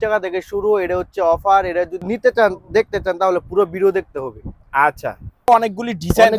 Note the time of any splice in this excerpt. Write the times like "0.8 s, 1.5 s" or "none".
2.0 s, 5.5 s